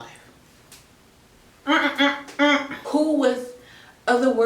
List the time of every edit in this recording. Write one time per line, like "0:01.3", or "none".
0:02.8